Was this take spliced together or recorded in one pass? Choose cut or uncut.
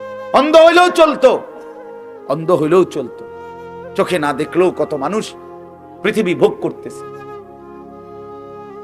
uncut